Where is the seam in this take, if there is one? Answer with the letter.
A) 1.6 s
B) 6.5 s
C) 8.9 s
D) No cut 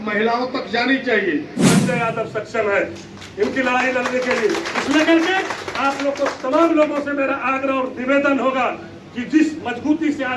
A